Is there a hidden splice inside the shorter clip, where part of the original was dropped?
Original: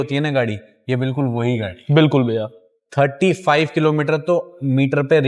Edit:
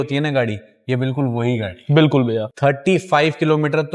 yes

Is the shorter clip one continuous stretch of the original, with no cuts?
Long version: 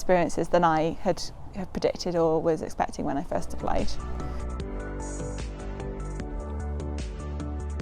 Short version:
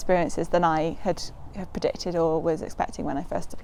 yes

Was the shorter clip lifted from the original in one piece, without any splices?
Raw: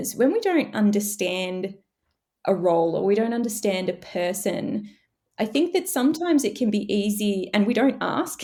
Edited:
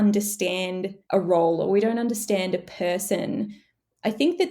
no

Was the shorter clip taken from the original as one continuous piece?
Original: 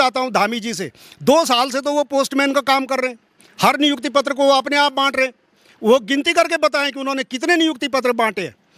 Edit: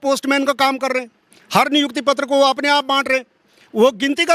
yes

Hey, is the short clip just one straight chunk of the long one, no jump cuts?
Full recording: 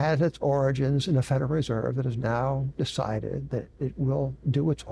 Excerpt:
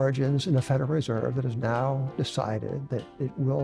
yes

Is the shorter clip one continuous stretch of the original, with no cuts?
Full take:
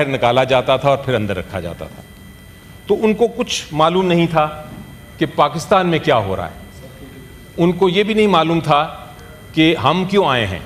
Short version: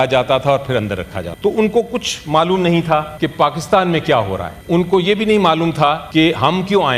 no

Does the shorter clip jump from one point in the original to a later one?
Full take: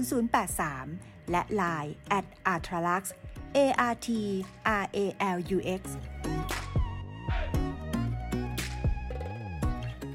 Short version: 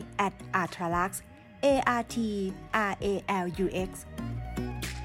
yes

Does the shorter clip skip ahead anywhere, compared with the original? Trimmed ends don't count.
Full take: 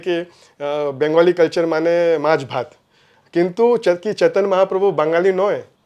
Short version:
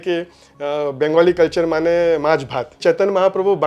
yes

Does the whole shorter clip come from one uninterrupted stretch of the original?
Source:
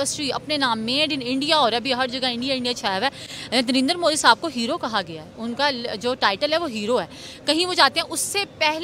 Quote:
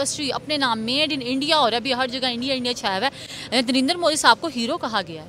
yes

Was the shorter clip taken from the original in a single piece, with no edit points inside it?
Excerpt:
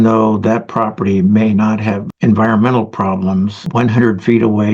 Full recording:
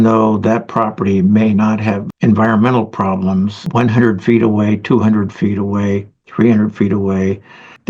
yes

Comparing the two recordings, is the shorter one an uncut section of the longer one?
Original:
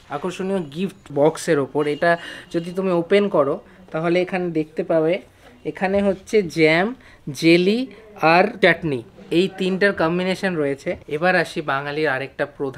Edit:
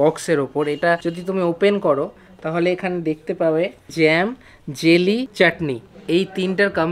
no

